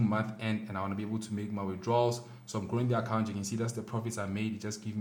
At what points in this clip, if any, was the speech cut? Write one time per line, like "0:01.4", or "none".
none